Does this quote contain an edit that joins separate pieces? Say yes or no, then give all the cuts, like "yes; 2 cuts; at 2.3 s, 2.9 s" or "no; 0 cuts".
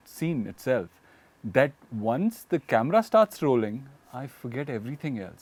no; 0 cuts